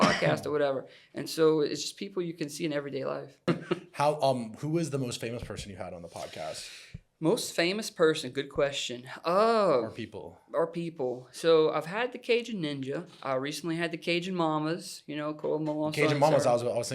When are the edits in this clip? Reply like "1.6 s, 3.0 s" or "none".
3.5 s